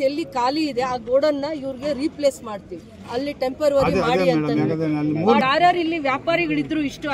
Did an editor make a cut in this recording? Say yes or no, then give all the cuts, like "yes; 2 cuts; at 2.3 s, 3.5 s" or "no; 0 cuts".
yes; 1 cut; at 5.4 s